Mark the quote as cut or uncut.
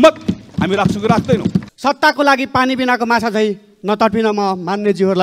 cut